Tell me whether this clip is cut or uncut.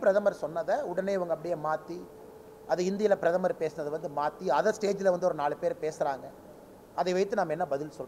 uncut